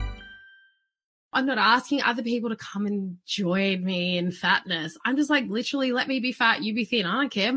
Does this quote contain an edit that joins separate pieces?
yes; 1 cut; at 1.3 s

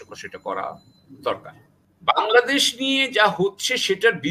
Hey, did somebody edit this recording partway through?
yes; 1 cut; at 1.9 s

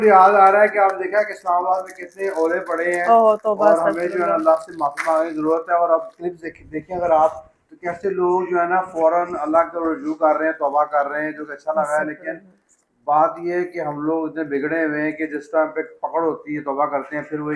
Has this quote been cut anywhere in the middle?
no; 0 cuts

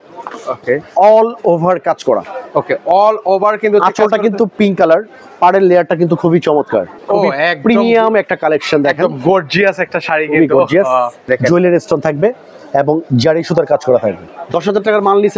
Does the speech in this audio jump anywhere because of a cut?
yes; 3 cuts; at 6.9 s, 11.3 s, 14.3 s

